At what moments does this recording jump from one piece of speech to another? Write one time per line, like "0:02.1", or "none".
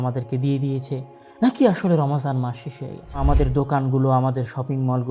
0:03.2